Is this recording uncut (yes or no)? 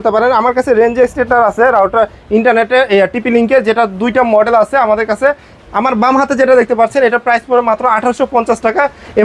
yes